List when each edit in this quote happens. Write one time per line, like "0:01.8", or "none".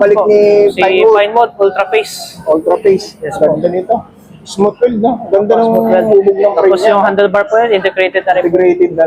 none